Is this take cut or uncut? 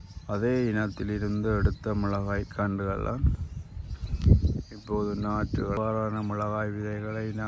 cut